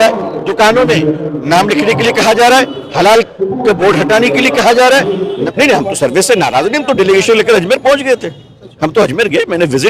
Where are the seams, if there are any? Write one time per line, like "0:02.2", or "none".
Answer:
0:05.5